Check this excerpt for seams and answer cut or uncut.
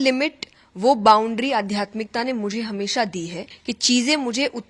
cut